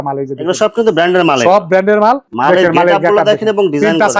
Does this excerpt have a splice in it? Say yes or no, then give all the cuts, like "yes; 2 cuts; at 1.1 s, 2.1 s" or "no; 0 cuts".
yes; 1 cut; at 2.3 s